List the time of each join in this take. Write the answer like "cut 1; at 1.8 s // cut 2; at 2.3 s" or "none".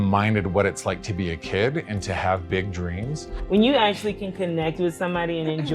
cut 1; at 3.3 s

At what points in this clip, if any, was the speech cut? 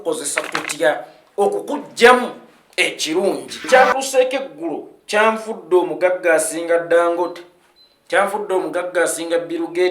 cut 1; at 3.5 s

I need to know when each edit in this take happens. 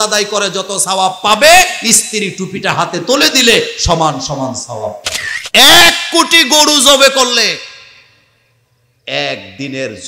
cut 1; at 5.4 s

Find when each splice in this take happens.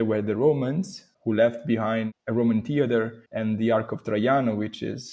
cut 1; at 2.1 s // cut 2; at 3.2 s

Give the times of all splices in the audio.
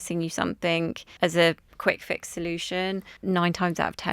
cut 1; at 1.0 s // cut 2; at 1.7 s // cut 3; at 3.1 s

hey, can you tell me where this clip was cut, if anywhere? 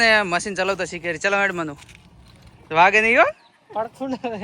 none

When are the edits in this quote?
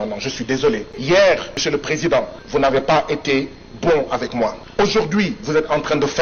cut 1; at 0.9 s // cut 2; at 1.5 s // cut 3; at 2.4 s // cut 4; at 4.6 s

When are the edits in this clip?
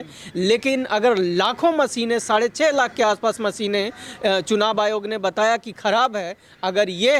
none

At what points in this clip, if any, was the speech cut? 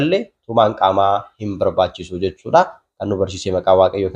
none

